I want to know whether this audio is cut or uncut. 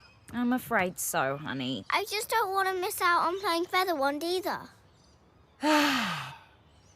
cut